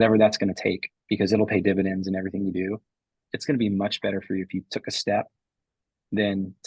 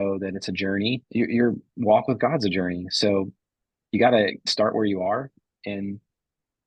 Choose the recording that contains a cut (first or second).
first